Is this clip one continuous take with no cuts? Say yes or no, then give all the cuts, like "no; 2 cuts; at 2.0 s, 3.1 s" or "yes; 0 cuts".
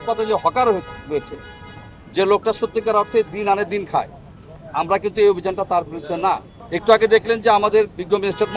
yes; 0 cuts